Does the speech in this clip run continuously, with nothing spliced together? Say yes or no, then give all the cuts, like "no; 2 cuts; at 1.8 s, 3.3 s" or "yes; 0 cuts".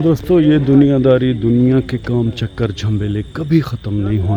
yes; 0 cuts